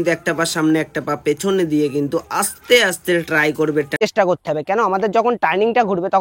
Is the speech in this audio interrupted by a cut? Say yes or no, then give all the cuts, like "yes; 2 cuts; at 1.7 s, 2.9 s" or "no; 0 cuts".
yes; 1 cut; at 4.0 s